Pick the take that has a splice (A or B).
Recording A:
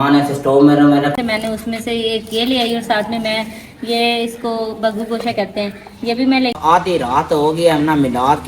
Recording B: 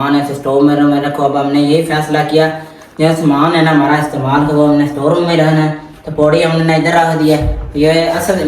A